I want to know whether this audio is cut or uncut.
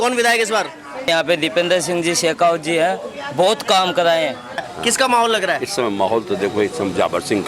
cut